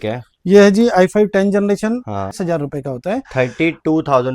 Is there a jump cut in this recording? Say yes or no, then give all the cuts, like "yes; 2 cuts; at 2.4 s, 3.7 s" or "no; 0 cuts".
yes; 1 cut; at 2.4 s